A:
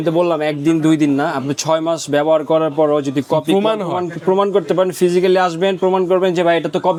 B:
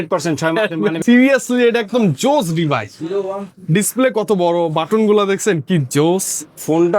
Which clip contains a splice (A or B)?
B